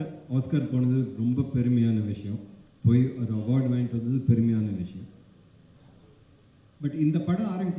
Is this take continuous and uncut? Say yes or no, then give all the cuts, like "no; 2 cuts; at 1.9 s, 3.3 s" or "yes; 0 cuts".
yes; 0 cuts